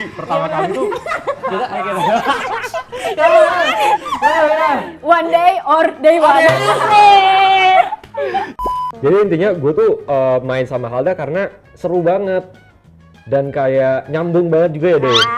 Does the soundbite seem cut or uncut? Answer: cut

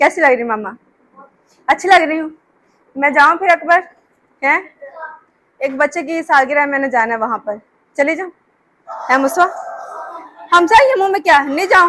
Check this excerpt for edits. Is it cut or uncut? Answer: uncut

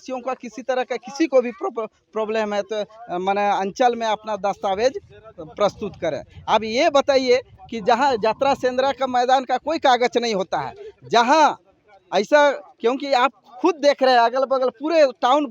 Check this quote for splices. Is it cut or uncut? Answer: uncut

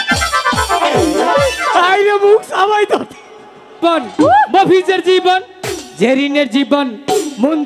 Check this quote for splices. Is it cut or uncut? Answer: cut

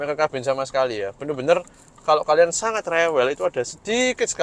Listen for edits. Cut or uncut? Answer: uncut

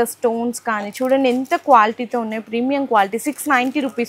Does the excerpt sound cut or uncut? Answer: uncut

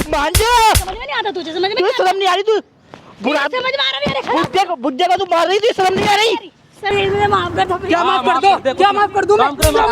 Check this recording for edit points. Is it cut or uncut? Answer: cut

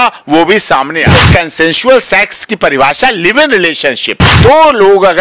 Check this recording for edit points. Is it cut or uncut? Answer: cut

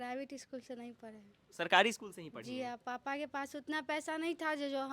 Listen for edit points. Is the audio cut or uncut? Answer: uncut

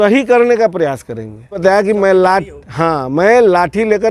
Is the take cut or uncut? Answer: cut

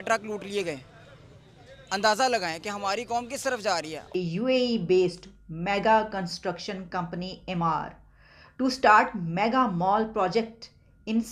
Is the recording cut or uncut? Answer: cut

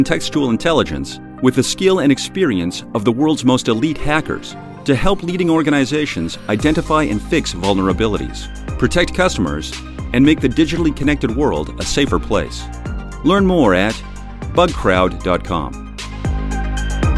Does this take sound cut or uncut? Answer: cut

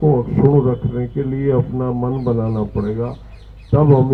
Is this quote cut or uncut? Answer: uncut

